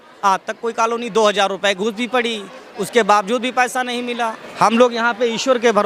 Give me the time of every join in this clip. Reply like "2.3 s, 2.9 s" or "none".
4.4 s